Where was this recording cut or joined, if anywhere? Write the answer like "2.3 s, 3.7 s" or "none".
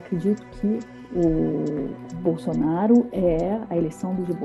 1.0 s

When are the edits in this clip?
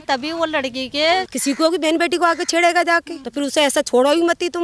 1.3 s, 3.2 s

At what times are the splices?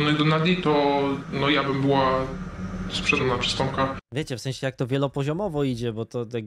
none

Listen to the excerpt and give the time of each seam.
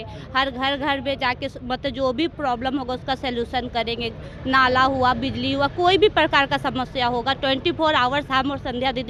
none

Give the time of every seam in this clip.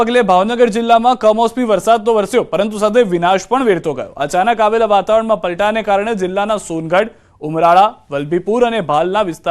1.0 s

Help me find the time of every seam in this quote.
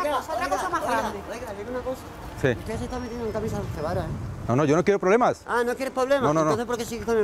4.2 s

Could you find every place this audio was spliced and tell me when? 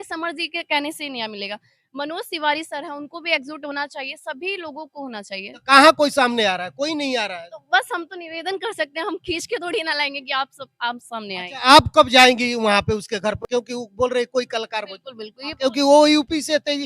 none

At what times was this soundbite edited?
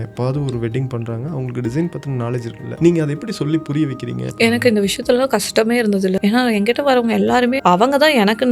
2.6 s, 4.2 s, 6.2 s, 7.6 s

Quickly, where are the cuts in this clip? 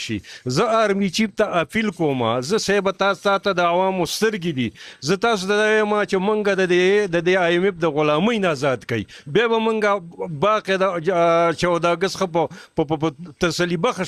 none

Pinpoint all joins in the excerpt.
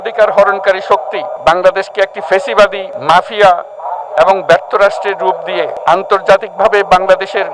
1.3 s, 2.9 s, 5.7 s

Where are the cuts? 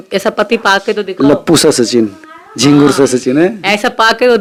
none

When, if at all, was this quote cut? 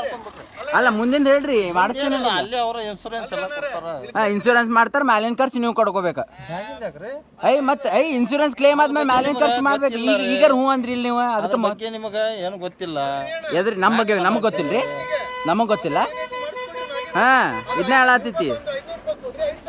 none

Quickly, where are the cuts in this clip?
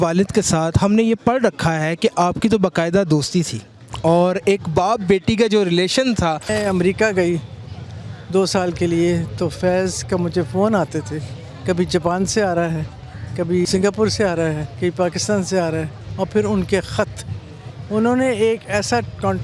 6.5 s, 13.6 s, 14.7 s, 16.0 s

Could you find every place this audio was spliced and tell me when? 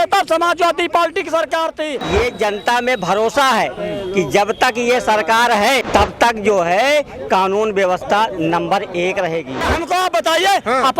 2.0 s, 5.8 s, 9.7 s

